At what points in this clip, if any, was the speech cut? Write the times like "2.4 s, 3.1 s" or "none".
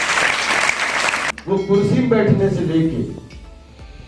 1.3 s